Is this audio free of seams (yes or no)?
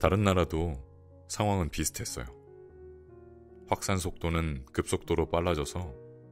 yes